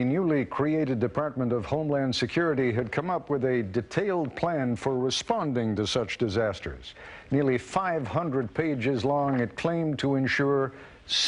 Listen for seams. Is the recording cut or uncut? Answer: cut